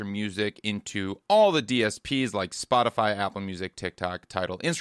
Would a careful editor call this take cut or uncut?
uncut